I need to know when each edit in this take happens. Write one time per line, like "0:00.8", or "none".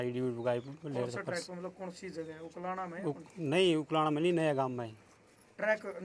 none